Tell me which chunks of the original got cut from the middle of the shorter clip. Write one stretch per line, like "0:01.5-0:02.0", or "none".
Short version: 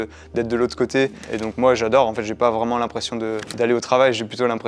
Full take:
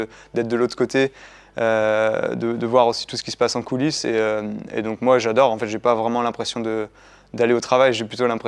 0:01.2-0:04.7
0:06.9-0:07.2